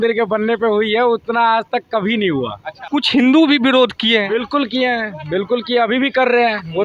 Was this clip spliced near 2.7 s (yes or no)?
yes